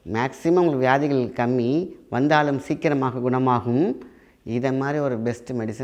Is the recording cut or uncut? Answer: uncut